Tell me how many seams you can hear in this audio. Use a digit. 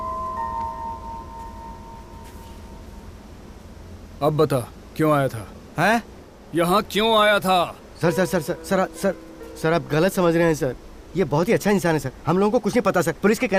0